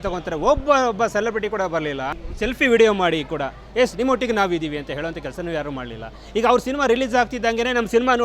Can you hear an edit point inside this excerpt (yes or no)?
no